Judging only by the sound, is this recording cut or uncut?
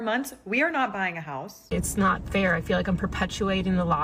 cut